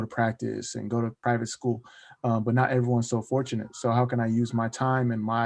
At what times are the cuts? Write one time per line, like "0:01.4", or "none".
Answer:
0:01.2